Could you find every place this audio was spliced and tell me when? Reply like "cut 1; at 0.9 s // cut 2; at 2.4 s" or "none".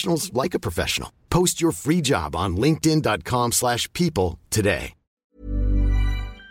cut 1; at 5.4 s